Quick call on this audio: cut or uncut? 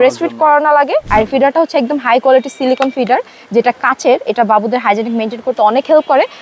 cut